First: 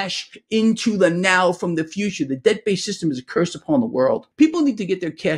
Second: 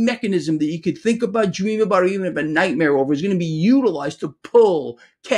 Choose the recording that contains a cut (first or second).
first